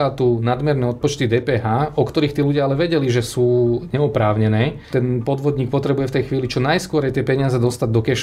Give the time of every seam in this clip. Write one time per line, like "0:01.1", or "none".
0:04.8

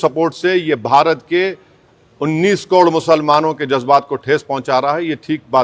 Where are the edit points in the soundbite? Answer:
none

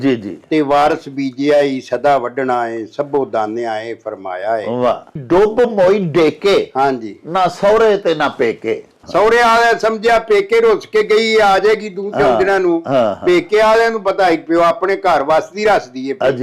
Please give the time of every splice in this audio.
0:05.2
0:08.9

